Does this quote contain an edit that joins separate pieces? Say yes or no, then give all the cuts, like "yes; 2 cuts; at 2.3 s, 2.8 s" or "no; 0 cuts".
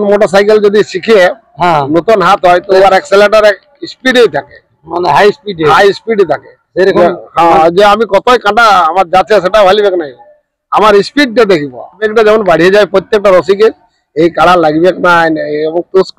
yes; 1 cut; at 12.1 s